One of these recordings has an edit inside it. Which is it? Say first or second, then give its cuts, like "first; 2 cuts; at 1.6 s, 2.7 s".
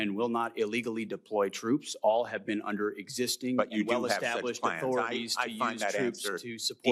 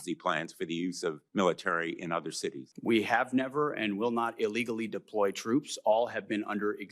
second; 2 cuts; at 1.2 s, 2.7 s